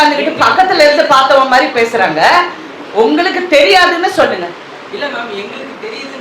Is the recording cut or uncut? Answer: uncut